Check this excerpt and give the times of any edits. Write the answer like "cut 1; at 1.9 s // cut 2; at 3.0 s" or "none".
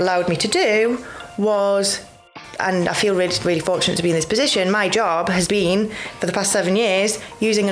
cut 1; at 2.4 s